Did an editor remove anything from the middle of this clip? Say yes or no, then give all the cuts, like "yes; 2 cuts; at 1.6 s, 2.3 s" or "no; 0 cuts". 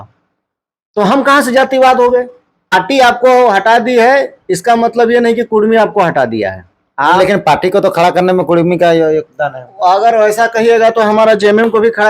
yes; 1 cut; at 2.7 s